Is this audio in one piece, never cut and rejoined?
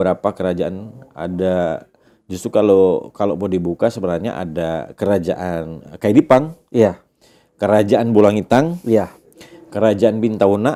yes; 0 cuts

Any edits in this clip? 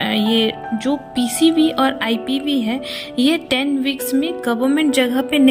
no; 0 cuts

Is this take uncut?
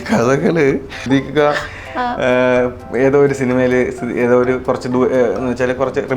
no; 1 cut; at 1.0 s

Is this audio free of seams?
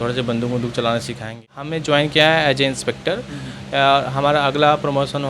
no; 1 cut; at 1.4 s

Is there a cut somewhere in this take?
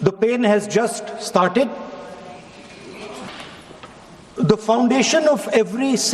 yes; 1 cut; at 3.3 s

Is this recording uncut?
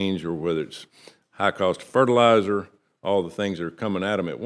yes; 0 cuts

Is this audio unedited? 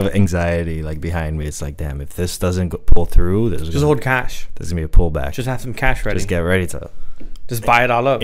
yes; 0 cuts

